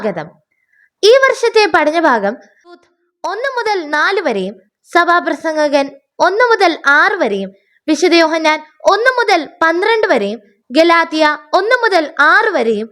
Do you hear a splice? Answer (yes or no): yes